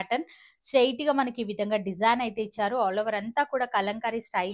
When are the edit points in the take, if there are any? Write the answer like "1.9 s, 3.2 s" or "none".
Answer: none